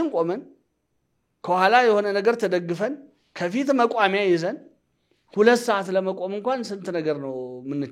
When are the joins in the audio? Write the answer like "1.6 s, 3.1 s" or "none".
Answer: none